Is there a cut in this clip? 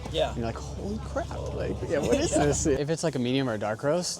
yes; 1 cut; at 2.8 s

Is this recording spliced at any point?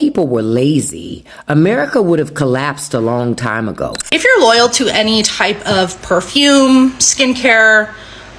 yes; 1 cut; at 4.0 s

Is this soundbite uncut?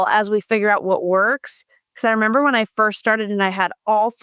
yes; 0 cuts

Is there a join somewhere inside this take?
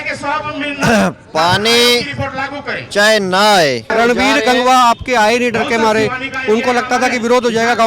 yes; 1 cut; at 3.9 s

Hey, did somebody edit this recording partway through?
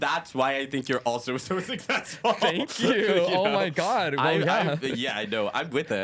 no; 0 cuts

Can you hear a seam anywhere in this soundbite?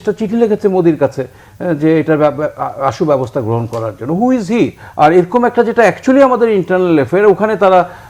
yes; 1 cut; at 4.8 s

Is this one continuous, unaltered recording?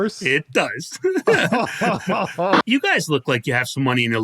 no; 1 cut; at 2.6 s

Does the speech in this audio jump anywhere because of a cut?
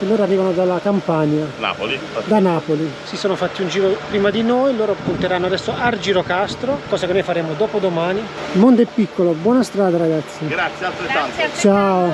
no; 0 cuts

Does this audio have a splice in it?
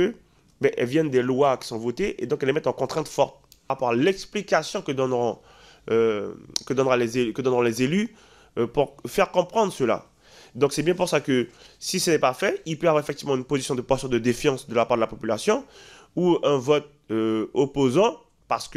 yes; 1 cut; at 3.8 s

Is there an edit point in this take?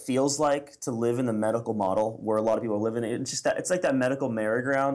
no; 0 cuts

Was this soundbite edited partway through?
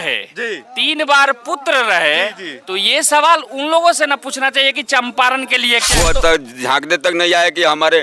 yes; 1 cut; at 5.9 s

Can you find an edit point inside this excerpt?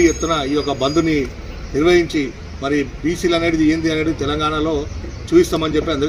no; 0 cuts

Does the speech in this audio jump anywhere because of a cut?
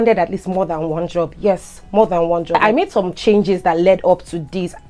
yes; 1 cut; at 2.6 s

